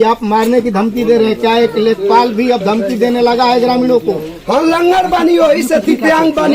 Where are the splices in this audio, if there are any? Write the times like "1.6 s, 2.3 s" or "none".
none